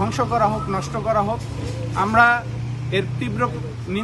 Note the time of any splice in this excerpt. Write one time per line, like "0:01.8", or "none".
none